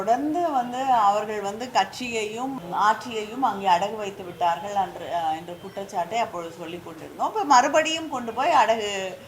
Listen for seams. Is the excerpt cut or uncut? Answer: cut